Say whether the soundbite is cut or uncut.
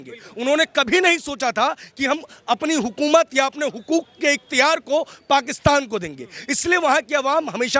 uncut